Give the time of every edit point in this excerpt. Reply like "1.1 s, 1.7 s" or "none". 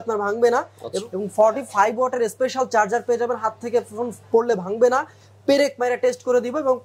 0.9 s